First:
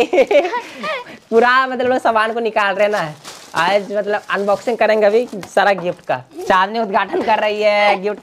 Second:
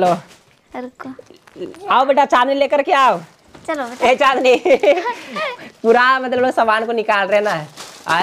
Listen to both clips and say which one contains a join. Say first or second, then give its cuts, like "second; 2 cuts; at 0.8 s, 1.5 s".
first; 1 cut; at 6.3 s